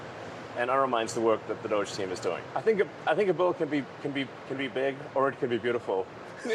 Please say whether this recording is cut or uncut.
cut